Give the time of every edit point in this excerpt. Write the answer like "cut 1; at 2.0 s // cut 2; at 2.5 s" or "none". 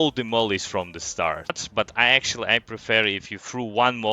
cut 1; at 1.6 s